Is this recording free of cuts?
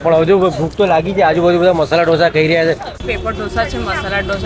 no; 1 cut; at 3.0 s

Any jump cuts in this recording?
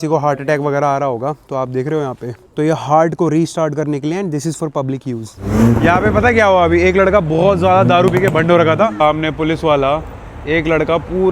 yes; 2 cuts; at 5.4 s, 8.9 s

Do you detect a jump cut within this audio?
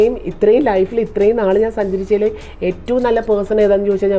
no; 0 cuts

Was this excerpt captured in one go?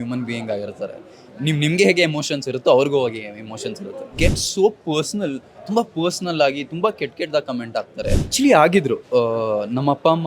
no; 2 cuts; at 4.1 s, 8.3 s

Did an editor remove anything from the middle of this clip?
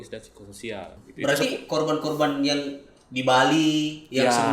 yes; 1 cut; at 1.0 s

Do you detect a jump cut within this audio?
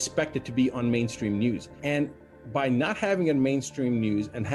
no; 0 cuts

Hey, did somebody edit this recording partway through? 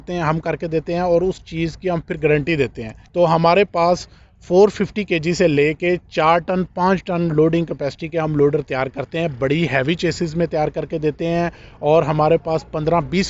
yes; 1 cut; at 2.9 s

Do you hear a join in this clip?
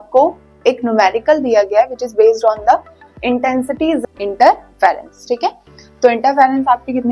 yes; 1 cut; at 4.0 s

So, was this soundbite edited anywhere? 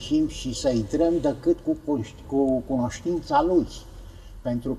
no; 0 cuts

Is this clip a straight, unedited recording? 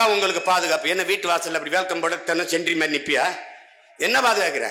yes; 0 cuts

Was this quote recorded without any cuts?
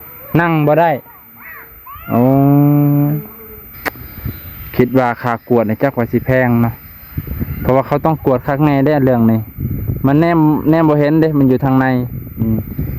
no; 1 cut; at 3.7 s

